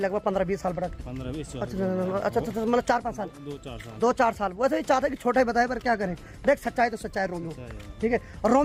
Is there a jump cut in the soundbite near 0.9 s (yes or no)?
no